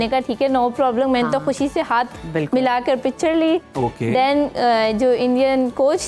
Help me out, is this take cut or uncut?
uncut